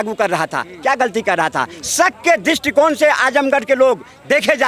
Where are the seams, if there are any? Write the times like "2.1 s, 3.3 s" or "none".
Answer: none